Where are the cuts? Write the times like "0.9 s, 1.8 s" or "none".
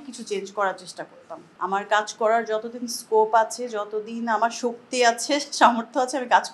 1.4 s